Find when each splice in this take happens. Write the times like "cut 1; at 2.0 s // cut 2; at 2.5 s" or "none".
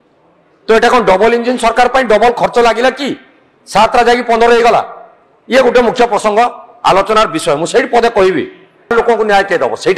cut 1; at 8.9 s